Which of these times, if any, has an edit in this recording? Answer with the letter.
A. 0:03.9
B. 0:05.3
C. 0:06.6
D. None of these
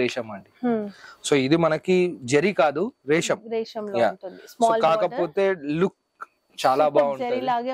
D